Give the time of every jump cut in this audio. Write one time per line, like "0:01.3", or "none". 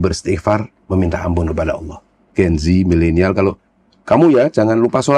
0:02.2